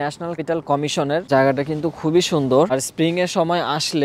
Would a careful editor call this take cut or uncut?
cut